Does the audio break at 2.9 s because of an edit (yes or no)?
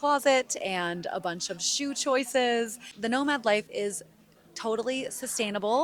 yes